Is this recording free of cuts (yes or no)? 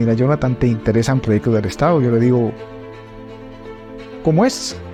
yes